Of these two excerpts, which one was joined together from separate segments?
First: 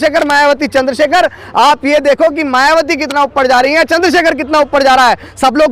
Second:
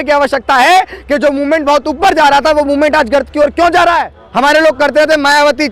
second; 1 cut; at 4.2 s

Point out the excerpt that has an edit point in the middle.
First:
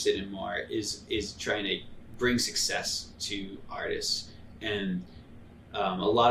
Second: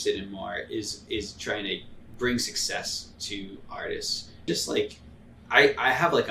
second; 1 cut; at 4.5 s

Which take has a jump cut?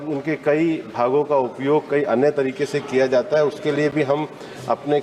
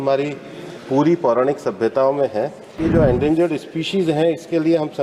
second; 1 cut; at 2.8 s

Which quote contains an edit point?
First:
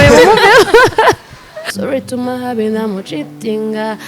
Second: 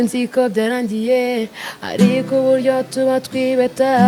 first; 1 cut; at 1.6 s

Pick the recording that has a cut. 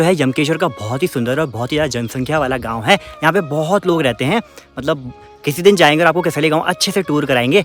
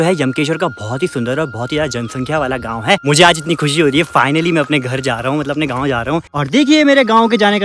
second; 2 cuts; at 3.0 s, 6.4 s

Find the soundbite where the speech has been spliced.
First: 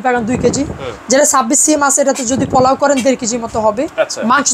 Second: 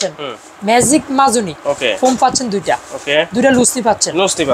second; 1 cut; at 1.6 s

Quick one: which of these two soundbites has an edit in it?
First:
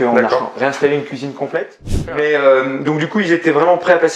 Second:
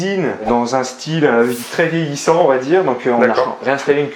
first; 1 cut; at 2.0 s

